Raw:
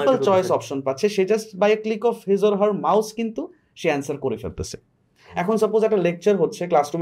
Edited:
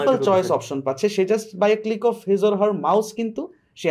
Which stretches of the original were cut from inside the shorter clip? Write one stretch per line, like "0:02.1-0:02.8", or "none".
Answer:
none